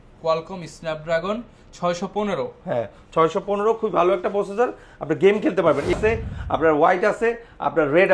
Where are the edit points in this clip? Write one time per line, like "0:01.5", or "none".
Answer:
0:06.0